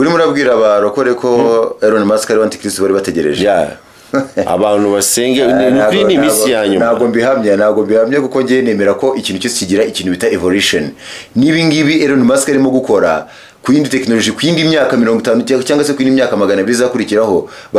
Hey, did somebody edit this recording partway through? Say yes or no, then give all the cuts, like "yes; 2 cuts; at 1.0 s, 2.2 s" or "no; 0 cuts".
no; 0 cuts